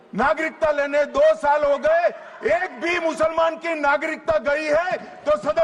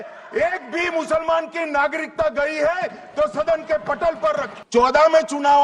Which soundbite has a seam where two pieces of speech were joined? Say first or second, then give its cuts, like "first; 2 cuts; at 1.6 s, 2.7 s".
second; 1 cut; at 4.5 s